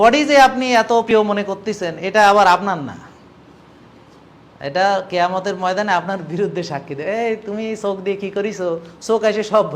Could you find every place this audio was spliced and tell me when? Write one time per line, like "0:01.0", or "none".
0:01.1

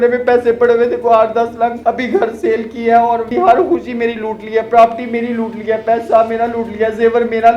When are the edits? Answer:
0:01.8
0:03.3

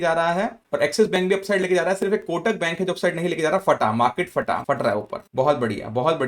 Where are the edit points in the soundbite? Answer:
0:04.6

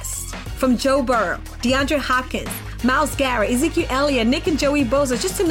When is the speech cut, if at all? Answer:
none

